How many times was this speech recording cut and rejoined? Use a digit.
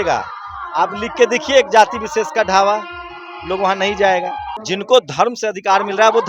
1